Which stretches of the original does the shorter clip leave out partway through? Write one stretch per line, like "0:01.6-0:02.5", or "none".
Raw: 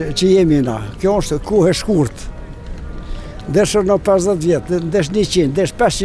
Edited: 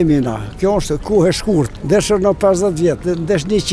0:02.2-0:03.4